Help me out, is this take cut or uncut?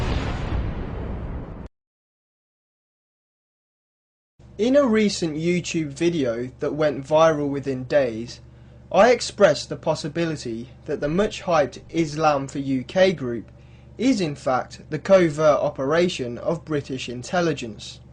uncut